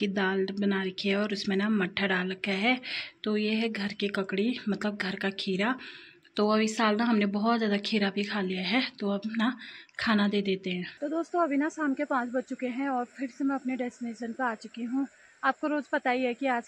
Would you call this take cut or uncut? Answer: uncut